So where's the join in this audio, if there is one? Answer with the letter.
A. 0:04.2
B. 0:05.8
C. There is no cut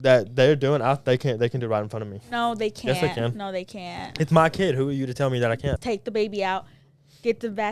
B